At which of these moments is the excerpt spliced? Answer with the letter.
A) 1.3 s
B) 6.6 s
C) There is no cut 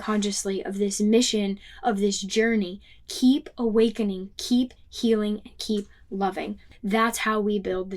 B